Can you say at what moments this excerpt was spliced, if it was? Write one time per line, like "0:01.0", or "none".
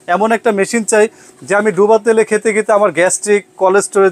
none